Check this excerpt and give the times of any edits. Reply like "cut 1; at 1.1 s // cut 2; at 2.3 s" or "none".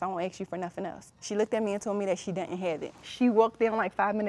cut 1; at 1.1 s // cut 2; at 3.0 s